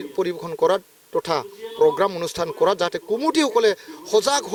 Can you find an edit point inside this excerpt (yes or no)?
no